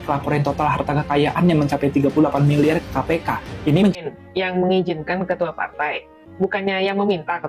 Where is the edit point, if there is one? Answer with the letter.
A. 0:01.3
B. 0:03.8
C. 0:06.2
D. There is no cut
B